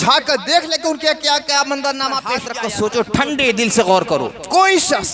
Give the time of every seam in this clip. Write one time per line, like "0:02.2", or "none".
0:02.5